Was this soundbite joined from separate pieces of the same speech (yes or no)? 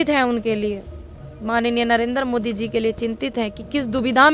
no